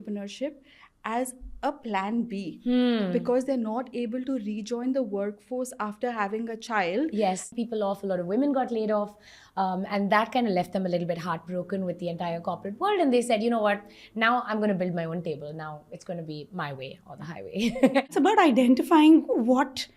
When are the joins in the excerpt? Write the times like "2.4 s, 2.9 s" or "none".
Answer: 7.5 s, 18.1 s